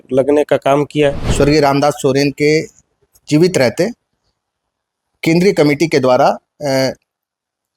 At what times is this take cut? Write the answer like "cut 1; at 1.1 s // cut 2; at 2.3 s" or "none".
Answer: cut 1; at 1.2 s